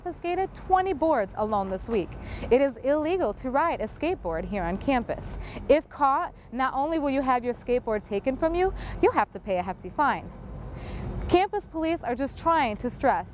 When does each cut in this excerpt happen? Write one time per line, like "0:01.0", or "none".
none